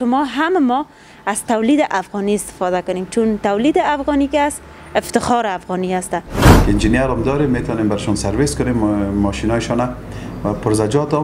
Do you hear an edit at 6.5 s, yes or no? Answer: yes